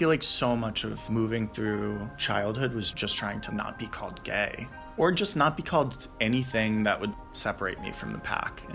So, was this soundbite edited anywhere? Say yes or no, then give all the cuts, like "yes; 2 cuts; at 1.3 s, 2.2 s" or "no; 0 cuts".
yes; 2 cuts; at 0.9 s, 2.1 s